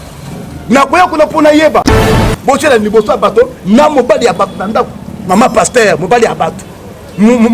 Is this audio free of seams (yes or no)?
no